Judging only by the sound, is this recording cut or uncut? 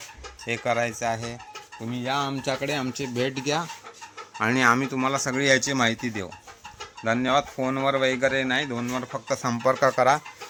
uncut